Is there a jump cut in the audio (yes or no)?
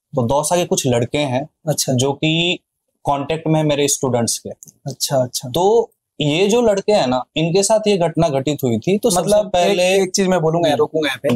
no